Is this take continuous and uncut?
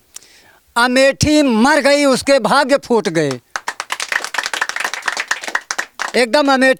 yes; 0 cuts

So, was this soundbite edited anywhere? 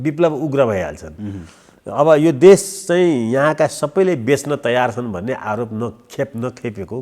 no; 0 cuts

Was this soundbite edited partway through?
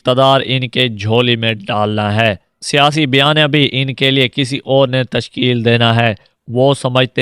yes; 2 cuts; at 2.4 s, 6.2 s

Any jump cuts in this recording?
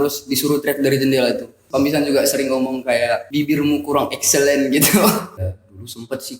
yes; 3 cuts; at 1.6 s, 3.3 s, 5.3 s

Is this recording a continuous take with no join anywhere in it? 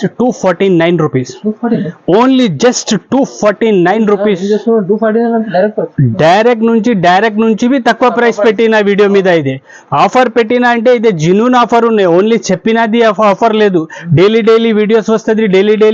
yes; 0 cuts

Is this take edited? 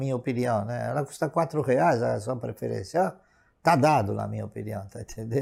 no; 0 cuts

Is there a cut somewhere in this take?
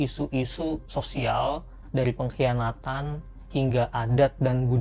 no; 0 cuts

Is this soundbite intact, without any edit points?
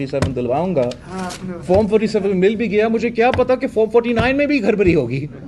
yes; 0 cuts

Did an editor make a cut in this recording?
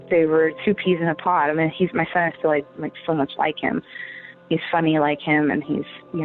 no; 0 cuts

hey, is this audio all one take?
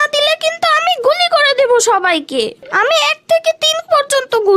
no; 1 cut; at 2.6 s

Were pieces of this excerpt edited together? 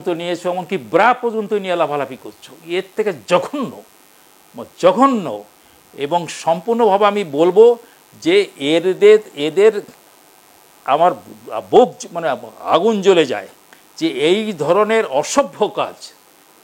no; 0 cuts

